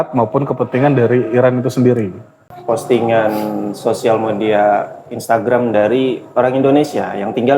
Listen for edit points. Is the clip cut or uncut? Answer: cut